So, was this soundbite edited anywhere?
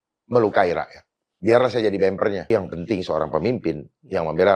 yes; 2 cuts; at 1.3 s, 2.5 s

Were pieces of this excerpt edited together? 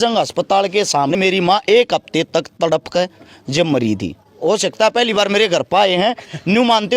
yes; 2 cuts; at 1.1 s, 4.4 s

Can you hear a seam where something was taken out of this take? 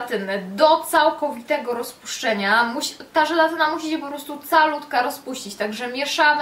no; 0 cuts

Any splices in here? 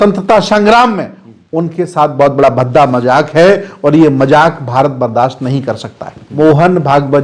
yes; 1 cut; at 6.2 s

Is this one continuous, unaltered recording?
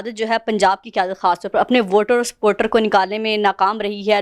yes; 0 cuts

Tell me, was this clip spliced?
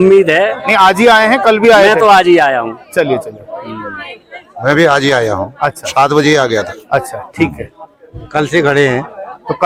no; 0 cuts

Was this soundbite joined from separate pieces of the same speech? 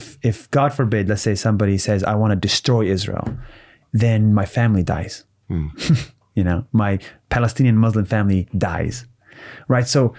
no; 0 cuts

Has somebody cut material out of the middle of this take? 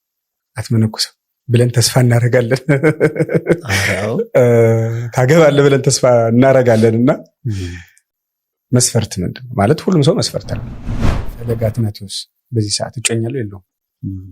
yes; 1 cut; at 11.1 s

